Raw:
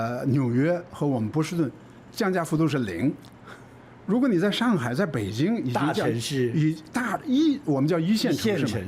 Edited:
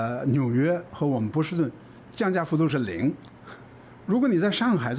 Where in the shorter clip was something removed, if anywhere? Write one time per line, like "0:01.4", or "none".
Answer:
none